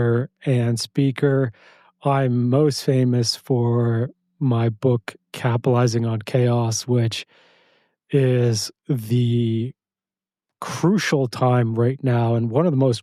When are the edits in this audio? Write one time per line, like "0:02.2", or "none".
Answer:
none